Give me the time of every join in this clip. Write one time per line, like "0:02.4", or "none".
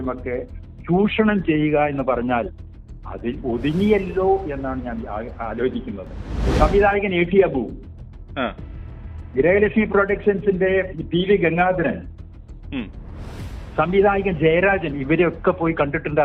0:06.5